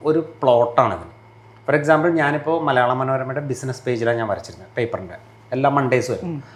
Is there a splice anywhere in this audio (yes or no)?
no